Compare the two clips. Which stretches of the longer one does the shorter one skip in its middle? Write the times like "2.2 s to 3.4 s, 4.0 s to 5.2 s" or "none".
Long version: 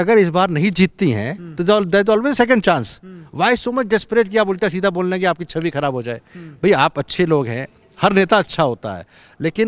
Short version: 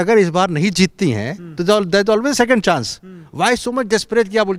none